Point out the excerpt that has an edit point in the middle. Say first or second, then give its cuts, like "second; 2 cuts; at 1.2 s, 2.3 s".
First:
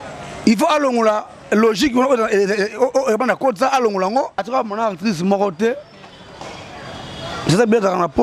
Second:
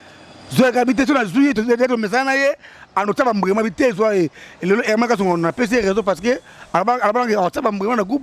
first; 1 cut; at 4.4 s